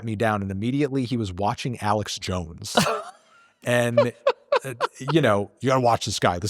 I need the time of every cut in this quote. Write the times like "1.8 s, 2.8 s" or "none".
5.5 s

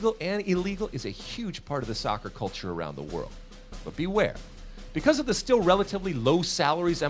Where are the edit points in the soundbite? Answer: none

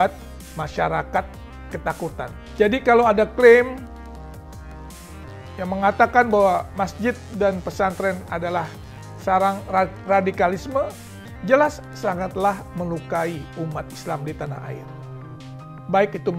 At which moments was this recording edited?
2.3 s

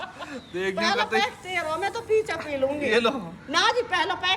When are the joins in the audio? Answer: none

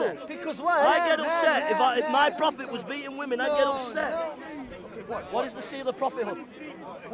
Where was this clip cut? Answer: 4.4 s

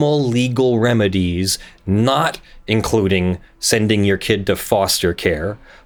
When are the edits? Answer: none

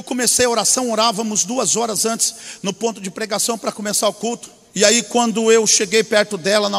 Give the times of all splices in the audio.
4.6 s

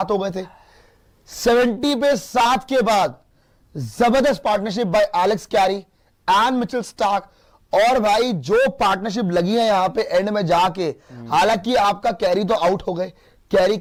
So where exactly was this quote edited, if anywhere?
none

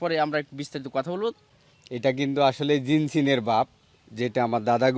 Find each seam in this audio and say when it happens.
1.5 s

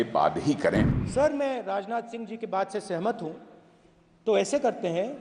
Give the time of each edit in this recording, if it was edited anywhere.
1.0 s

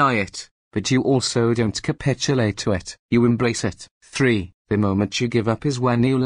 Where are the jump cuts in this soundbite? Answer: 4.4 s

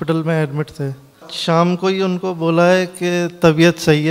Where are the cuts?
1.3 s

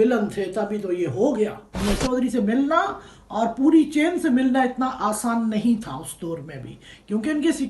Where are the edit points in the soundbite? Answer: 1.8 s

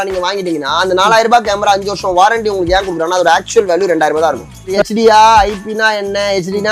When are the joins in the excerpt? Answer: 4.8 s

